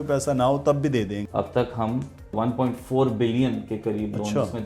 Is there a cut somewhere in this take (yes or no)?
yes